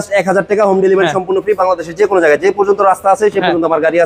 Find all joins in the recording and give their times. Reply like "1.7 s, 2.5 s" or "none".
none